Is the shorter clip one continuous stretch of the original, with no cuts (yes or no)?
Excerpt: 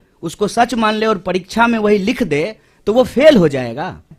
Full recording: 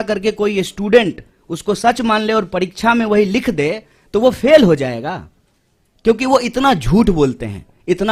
yes